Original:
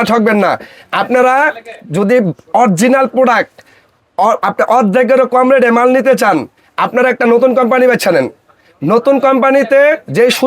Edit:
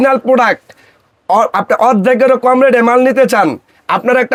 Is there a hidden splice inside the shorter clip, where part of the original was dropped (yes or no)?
no